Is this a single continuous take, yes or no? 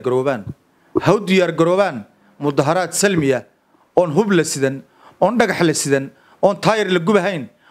yes